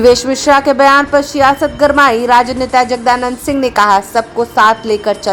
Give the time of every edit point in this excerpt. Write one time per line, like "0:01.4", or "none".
none